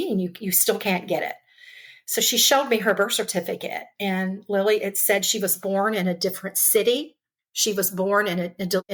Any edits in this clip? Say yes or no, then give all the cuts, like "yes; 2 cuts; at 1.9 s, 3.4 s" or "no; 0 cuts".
no; 0 cuts